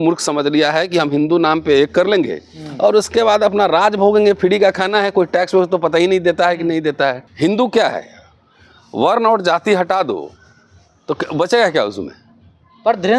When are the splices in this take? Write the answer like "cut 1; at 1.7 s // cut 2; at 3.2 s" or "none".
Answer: cut 1; at 7.3 s

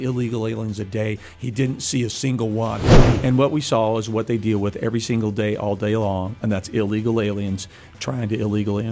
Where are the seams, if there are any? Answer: cut 1; at 2.8 s

